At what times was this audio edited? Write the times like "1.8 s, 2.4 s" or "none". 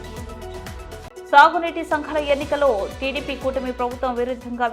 1.0 s